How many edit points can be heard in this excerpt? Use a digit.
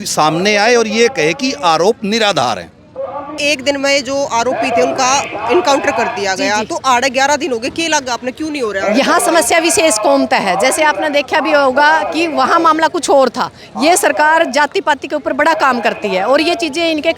1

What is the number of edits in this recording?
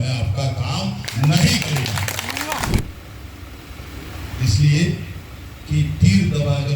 1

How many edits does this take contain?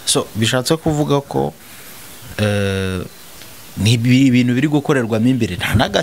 0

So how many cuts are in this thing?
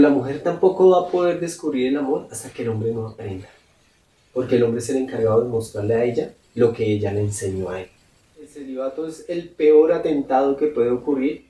1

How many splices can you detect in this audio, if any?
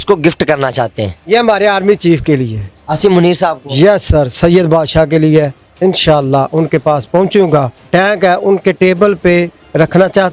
2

